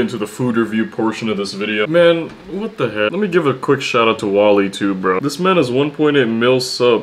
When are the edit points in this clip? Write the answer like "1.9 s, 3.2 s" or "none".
3.1 s